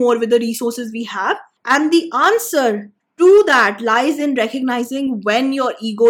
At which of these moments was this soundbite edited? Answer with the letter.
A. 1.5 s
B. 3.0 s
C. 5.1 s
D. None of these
A